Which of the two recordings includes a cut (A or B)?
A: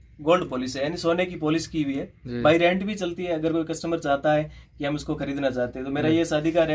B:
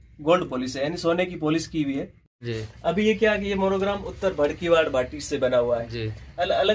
B